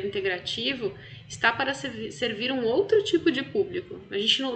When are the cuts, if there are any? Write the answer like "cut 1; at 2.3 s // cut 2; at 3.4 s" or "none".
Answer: none